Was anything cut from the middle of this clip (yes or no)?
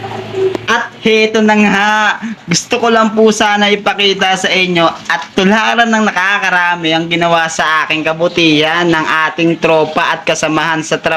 no